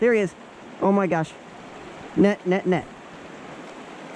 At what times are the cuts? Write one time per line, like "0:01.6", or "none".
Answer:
none